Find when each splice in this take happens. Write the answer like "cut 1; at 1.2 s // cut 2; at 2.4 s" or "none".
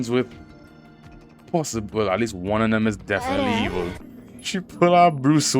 cut 1; at 4.0 s

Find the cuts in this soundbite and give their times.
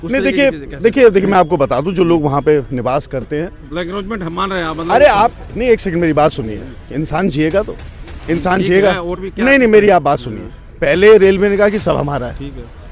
cut 1; at 3.7 s // cut 2; at 9.2 s

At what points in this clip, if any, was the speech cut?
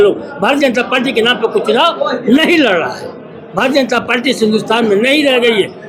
none

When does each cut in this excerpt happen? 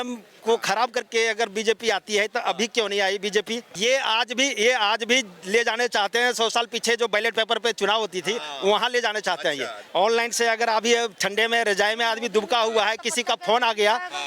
cut 1; at 3.6 s // cut 2; at 9.7 s

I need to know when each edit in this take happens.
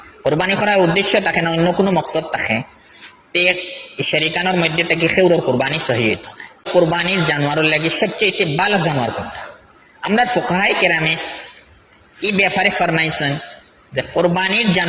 cut 1; at 6.7 s

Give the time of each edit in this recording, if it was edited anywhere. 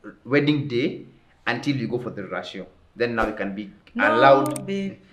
none

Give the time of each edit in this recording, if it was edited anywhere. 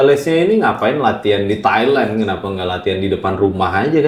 none

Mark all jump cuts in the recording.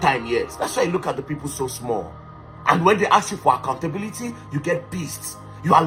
none

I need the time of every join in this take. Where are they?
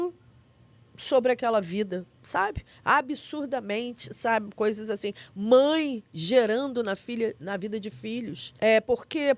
cut 1; at 8.4 s

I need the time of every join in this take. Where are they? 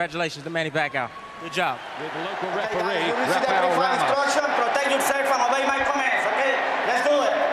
none

